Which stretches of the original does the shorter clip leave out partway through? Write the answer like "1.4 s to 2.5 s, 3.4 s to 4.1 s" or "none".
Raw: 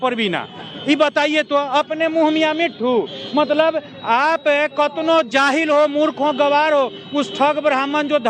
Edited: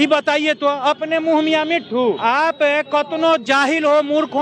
3.1 s to 4.0 s